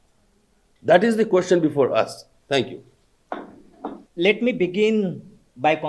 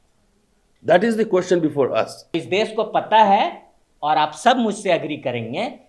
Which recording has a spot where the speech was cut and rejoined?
second; 1 cut; at 2.3 s

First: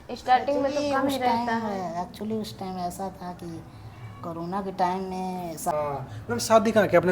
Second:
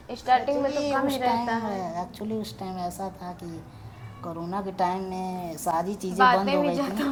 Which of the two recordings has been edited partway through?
first; 1 cut; at 5.7 s

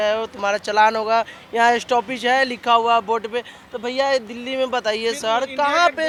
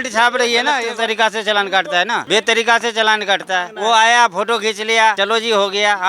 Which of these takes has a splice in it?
second; 4 cuts; at 0.8 s, 2.2 s, 3.7 s, 5.2 s

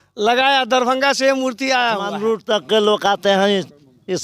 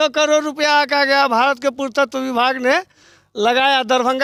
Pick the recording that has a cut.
first; 1 cut; at 2.0 s

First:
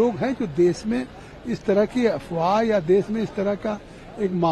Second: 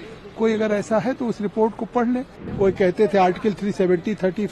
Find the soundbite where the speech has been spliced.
second; 1 cut; at 2.4 s

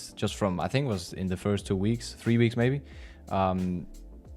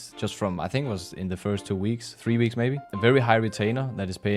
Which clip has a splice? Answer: second; 1 cut; at 2.9 s

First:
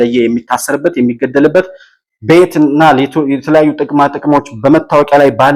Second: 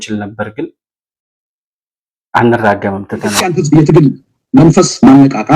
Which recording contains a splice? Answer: second; 1 cut; at 3.5 s

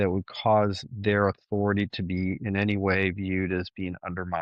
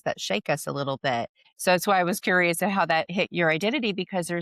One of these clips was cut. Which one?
second; 2 cuts; at 1.4 s, 3.3 s

